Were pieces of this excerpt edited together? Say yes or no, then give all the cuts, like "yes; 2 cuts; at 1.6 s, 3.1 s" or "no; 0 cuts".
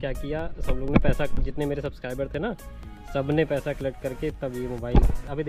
no; 0 cuts